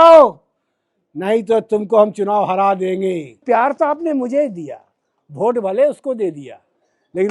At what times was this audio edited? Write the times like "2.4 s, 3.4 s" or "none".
3.4 s